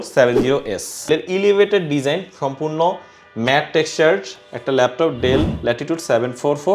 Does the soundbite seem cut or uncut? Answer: cut